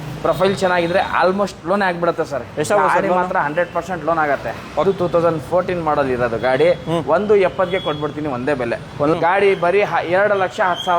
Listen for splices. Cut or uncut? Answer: cut